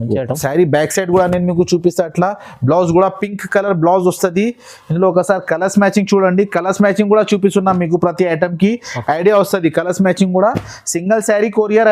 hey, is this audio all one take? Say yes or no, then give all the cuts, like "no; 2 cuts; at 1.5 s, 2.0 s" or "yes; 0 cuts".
yes; 0 cuts